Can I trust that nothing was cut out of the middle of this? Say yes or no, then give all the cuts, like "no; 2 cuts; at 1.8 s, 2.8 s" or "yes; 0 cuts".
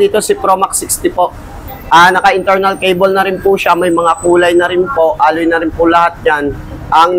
yes; 0 cuts